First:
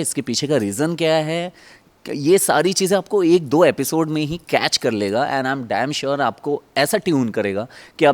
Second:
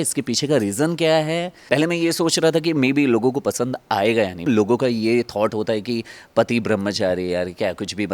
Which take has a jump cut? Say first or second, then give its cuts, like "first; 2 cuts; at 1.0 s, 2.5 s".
second; 2 cuts; at 1.5 s, 4.4 s